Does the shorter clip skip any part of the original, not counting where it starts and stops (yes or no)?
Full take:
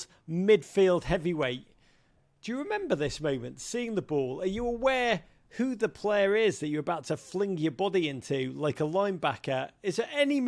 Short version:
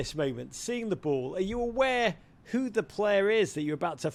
no